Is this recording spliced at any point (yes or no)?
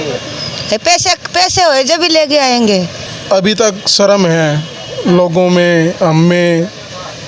yes